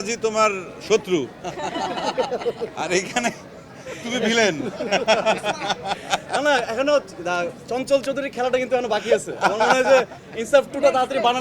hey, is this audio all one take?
yes; 0 cuts

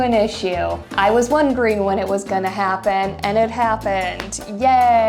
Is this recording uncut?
yes; 0 cuts

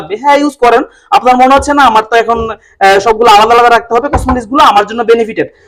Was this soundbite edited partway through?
no; 0 cuts

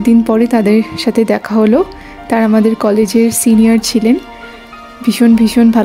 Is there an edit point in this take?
no; 0 cuts

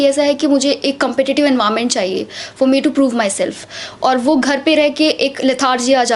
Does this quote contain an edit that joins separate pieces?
no; 0 cuts

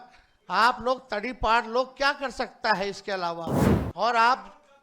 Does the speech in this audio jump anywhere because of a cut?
yes; 1 cut; at 3.6 s

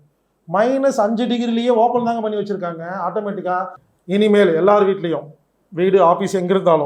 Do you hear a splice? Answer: yes; 1 cut; at 3.8 s

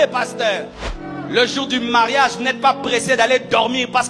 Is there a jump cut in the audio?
yes; 1 cut; at 1.0 s

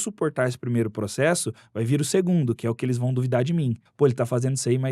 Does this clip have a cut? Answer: yes; 1 cut; at 3.8 s

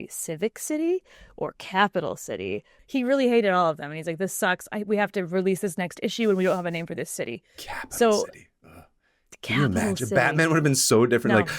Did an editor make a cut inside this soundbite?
yes; 1 cut; at 2.8 s

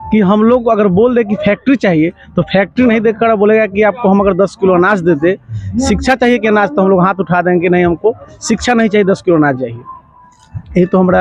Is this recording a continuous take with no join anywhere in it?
yes; 0 cuts

